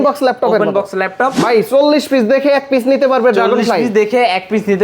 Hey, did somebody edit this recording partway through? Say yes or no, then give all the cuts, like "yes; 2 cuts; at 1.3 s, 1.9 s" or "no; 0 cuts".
yes; 1 cut; at 1.4 s